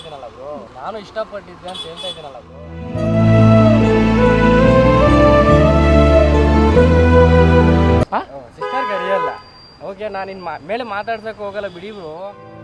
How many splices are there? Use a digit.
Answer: 1